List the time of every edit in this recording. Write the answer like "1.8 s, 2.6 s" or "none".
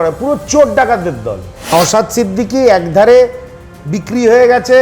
1.7 s